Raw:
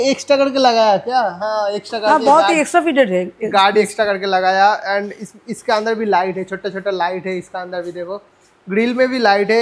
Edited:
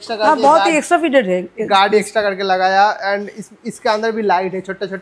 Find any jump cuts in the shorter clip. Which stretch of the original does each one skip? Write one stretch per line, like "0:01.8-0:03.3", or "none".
none